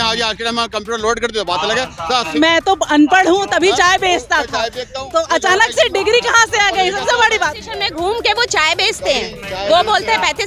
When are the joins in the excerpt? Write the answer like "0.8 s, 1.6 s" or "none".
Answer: 2.3 s, 7.6 s